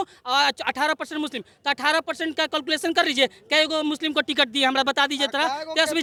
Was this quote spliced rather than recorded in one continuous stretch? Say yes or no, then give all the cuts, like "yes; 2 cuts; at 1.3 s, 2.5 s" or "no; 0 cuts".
no; 0 cuts